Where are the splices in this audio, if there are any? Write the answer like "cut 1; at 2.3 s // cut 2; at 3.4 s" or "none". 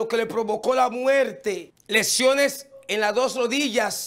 cut 1; at 1.7 s // cut 2; at 2.8 s